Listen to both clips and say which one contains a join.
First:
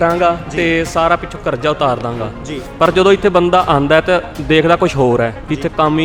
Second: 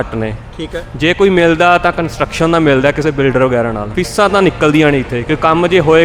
second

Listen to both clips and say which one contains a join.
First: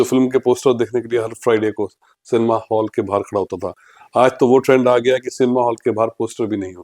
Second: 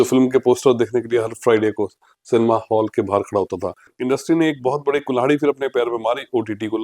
second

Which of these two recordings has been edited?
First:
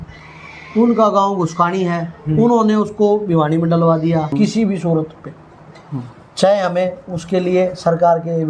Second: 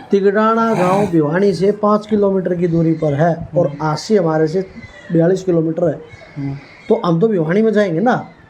first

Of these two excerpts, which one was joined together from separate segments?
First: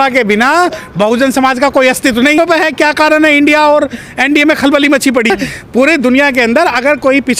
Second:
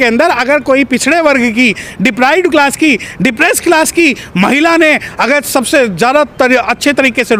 first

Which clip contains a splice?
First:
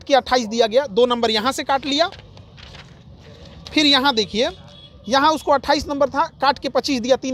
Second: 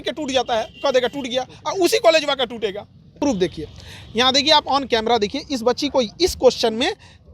second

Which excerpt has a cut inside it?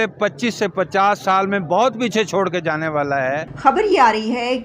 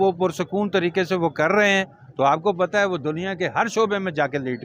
first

